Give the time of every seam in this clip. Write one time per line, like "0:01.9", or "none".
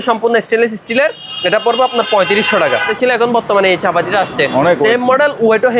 0:02.9